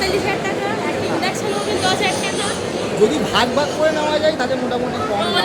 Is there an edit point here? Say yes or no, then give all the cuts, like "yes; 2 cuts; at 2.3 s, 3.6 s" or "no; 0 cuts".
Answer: no; 0 cuts